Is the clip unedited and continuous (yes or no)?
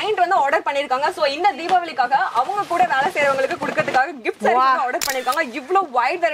yes